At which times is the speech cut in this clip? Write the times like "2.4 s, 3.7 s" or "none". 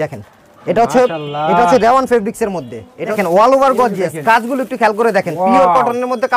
3.2 s